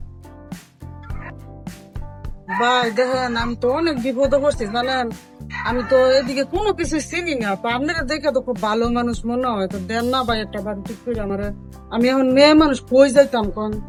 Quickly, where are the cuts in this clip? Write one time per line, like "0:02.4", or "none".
none